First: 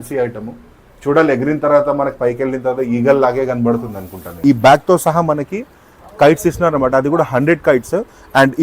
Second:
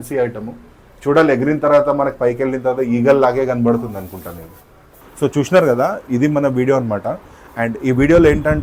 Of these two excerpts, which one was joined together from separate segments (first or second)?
first